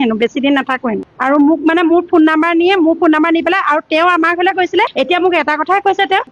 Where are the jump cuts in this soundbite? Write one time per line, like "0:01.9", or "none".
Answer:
none

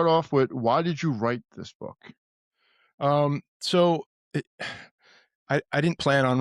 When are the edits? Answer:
none

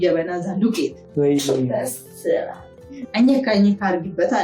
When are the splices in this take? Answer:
0:01.0
0:03.0

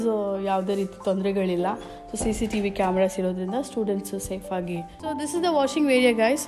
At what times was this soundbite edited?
0:04.9

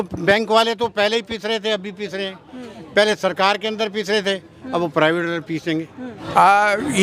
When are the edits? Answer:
none

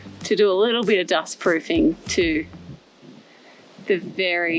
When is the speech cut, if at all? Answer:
none

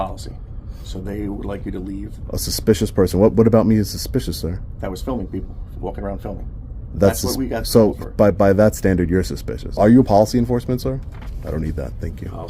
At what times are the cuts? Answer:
0:09.8

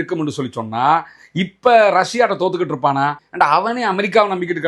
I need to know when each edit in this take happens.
0:03.2

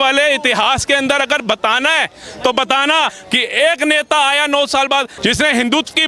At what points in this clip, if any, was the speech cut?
0:03.1
0:05.1

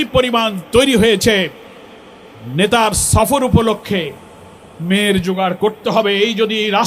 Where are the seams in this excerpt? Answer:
none

